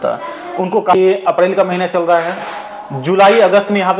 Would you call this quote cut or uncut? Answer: cut